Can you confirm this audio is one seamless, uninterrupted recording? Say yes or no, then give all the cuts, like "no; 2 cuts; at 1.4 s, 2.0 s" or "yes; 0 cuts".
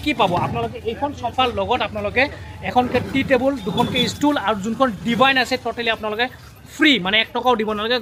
yes; 0 cuts